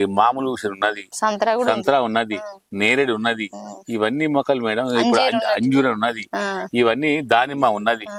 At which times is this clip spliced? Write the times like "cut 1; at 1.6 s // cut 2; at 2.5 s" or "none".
none